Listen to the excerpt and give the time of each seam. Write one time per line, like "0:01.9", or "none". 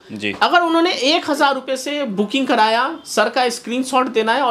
none